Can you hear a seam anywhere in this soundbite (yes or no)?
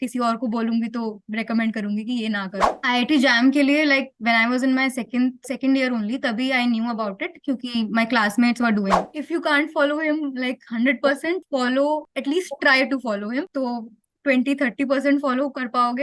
yes